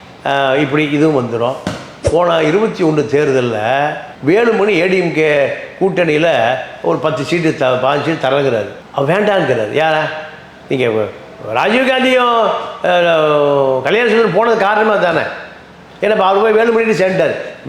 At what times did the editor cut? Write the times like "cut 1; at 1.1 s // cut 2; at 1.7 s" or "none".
cut 1; at 1.9 s